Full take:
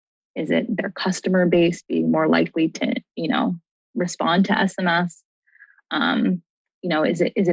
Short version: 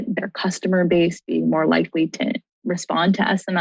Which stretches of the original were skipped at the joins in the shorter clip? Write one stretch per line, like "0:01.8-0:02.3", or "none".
0:03.1-0:03.8